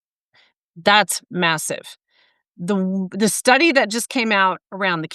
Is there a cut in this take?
no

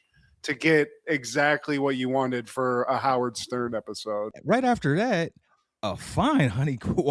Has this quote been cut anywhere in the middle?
yes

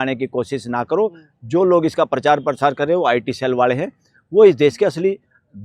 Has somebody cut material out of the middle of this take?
no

